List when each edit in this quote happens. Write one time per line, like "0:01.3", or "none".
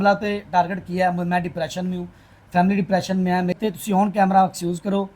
0:03.6